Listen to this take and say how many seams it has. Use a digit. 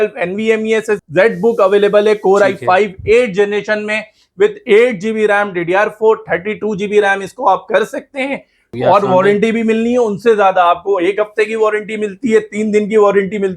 2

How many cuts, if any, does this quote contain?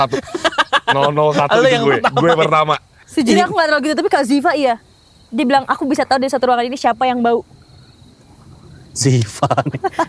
1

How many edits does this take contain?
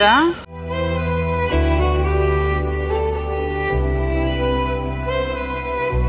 0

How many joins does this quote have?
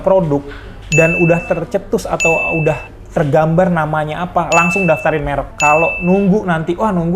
1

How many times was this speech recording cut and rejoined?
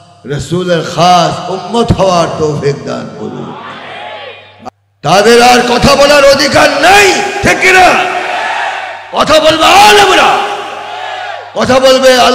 1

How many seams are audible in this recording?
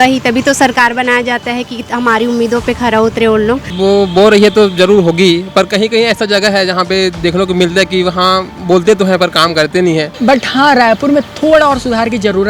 2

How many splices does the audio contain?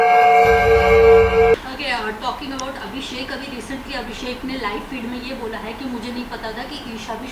1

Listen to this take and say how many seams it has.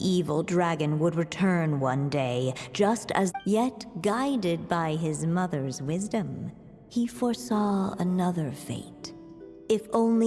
1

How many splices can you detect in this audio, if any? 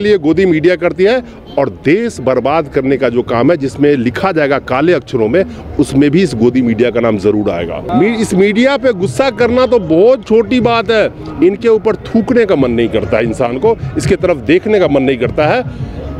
1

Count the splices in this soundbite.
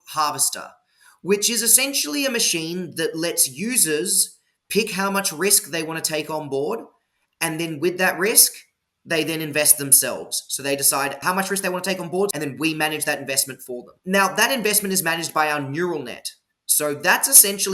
3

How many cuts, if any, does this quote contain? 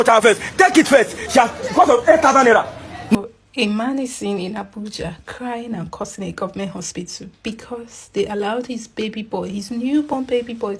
1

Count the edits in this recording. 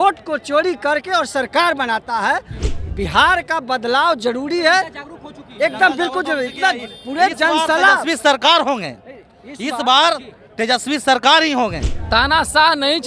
2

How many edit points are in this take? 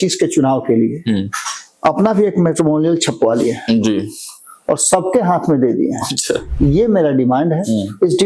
1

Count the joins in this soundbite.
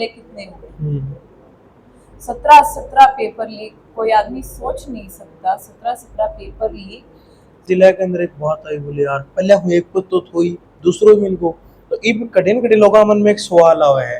1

